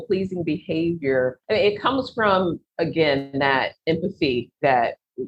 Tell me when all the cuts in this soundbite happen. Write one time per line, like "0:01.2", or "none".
0:01.4